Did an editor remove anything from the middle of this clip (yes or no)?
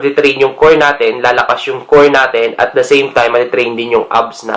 no